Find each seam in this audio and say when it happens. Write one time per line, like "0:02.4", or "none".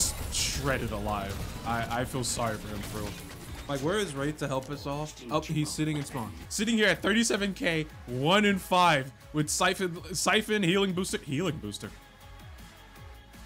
0:03.6
0:06.4